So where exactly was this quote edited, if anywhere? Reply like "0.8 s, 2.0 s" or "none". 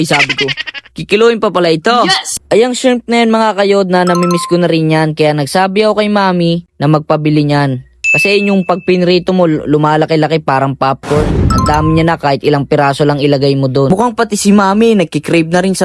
2.3 s, 13.9 s